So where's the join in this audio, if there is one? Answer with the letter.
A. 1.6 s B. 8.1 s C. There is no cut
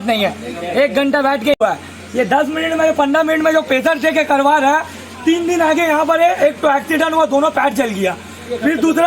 A